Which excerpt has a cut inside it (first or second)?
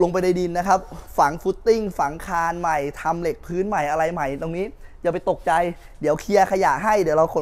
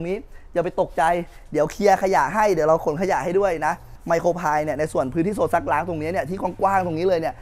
second